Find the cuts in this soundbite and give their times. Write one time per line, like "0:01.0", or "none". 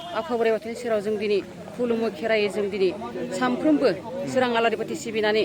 none